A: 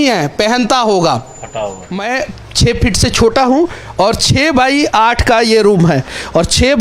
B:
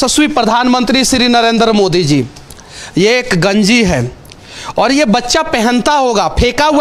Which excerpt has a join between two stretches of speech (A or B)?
A